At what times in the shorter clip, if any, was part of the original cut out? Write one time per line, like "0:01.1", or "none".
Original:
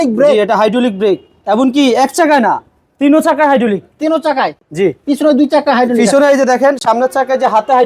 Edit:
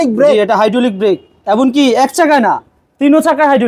none